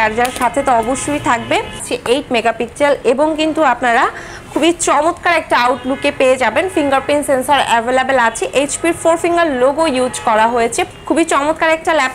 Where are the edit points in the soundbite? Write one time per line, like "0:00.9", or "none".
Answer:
0:01.9
0:10.9